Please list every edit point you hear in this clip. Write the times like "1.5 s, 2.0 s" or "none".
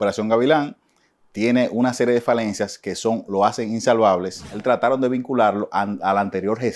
4.6 s